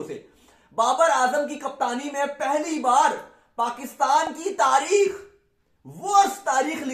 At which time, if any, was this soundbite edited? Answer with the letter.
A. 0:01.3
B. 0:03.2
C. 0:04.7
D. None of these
D